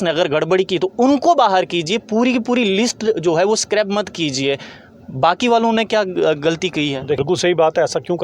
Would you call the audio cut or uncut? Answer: cut